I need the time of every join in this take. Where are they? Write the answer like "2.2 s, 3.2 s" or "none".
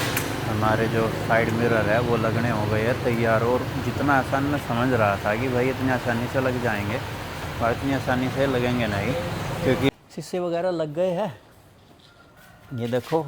9.9 s